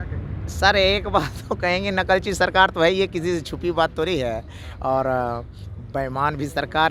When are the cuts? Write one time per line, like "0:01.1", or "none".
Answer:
none